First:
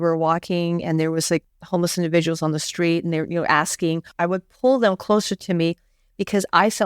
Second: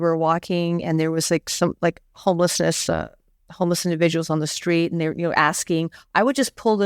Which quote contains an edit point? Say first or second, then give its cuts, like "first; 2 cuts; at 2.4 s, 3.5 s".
first; 2 cuts; at 1.5 s, 4.1 s